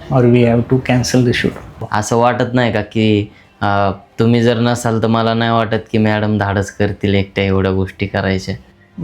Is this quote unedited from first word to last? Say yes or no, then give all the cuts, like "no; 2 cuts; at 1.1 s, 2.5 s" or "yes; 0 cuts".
no; 1 cut; at 1.7 s